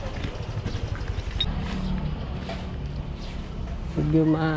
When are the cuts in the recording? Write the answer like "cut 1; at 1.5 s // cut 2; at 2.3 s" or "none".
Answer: cut 1; at 1.5 s